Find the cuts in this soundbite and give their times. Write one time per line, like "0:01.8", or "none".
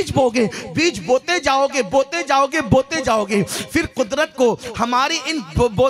none